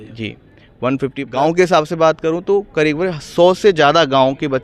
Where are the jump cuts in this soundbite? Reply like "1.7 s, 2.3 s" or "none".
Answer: 1.2 s